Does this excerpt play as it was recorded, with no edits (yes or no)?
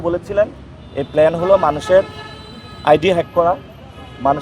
yes